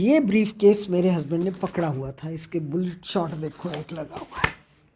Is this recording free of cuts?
yes; 0 cuts

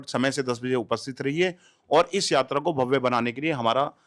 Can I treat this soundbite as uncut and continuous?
yes; 0 cuts

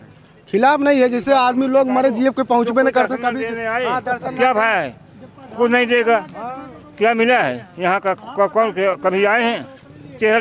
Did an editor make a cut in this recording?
no; 0 cuts

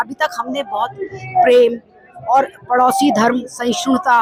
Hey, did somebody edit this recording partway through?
no; 0 cuts

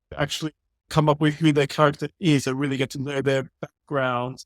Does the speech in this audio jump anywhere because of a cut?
yes; 1 cut; at 0.9 s

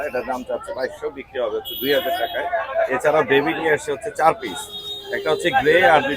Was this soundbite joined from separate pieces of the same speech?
no; 0 cuts

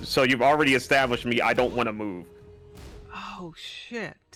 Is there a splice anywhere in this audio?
no; 0 cuts

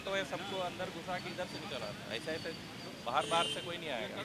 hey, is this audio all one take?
yes; 0 cuts

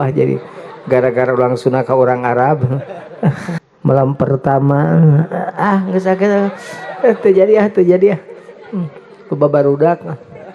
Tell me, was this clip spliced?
yes; 1 cut; at 3.5 s

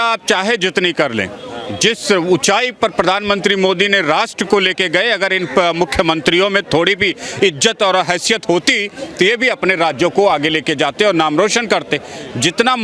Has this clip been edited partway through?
no; 0 cuts

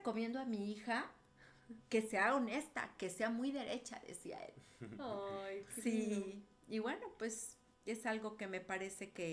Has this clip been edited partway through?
no; 0 cuts

